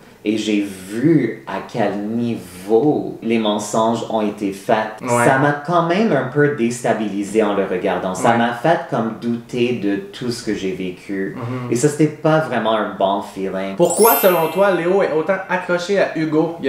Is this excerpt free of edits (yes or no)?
no